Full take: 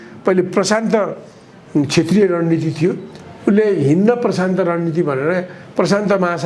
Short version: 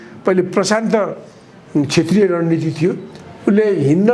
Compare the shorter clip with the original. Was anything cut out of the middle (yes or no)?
no